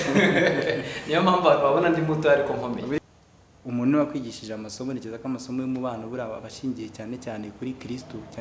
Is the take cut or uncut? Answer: cut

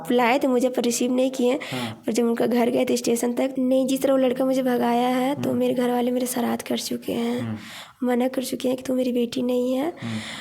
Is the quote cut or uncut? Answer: cut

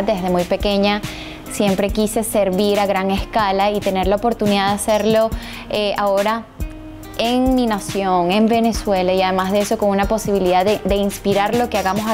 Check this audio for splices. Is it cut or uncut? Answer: uncut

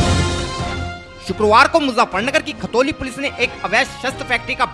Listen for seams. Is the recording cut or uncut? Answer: cut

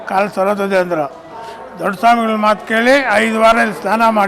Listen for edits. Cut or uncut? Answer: uncut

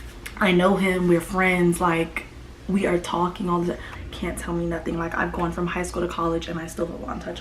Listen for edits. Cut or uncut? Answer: cut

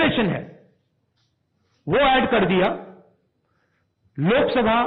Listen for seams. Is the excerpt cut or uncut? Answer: uncut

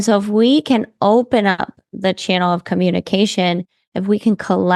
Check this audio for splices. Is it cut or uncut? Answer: uncut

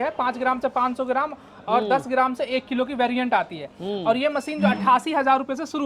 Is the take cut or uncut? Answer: uncut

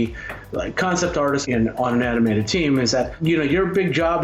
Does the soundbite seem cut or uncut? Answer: cut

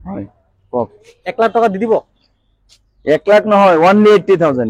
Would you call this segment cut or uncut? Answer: uncut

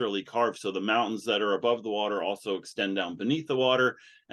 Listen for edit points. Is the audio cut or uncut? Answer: uncut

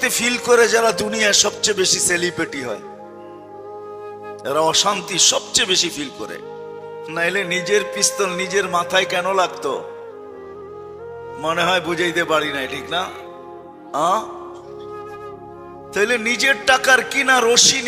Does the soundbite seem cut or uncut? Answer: uncut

